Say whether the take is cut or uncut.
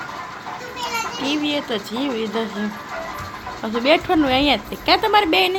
uncut